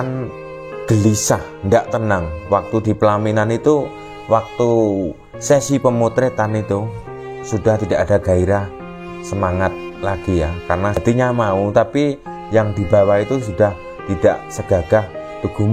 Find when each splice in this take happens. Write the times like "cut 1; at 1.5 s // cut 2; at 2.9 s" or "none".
cut 1; at 11.0 s